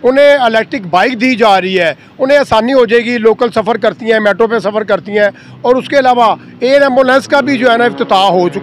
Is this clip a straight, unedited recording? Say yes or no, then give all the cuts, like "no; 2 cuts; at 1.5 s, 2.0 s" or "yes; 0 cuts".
yes; 0 cuts